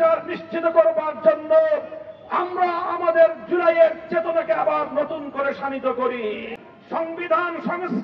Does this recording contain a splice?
yes; 1 cut; at 6.5 s

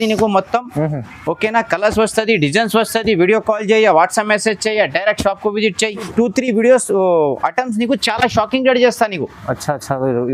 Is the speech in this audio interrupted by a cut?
yes; 1 cut; at 6.1 s

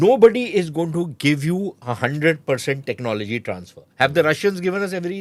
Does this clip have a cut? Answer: no; 0 cuts

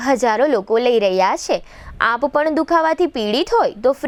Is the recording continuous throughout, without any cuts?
yes; 0 cuts

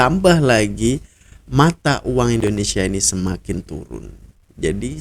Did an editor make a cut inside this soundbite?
no; 0 cuts

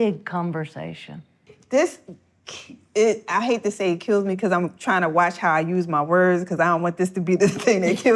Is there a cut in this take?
yes; 1 cut; at 1.4 s

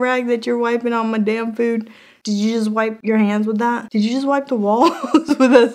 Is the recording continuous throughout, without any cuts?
yes; 0 cuts

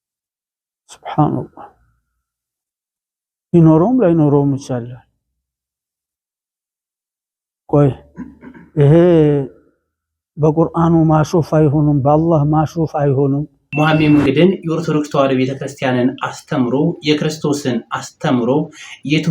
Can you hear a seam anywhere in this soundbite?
yes; 1 cut; at 13.6 s

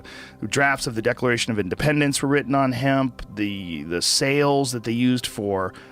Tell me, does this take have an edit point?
no; 0 cuts

